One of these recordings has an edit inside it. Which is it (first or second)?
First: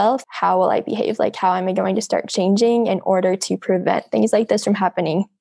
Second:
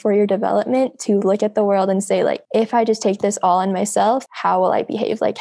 second